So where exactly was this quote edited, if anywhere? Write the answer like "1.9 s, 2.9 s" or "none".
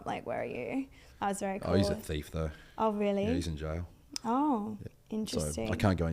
4.9 s